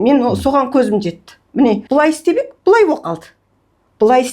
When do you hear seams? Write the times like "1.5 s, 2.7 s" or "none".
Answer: 1.8 s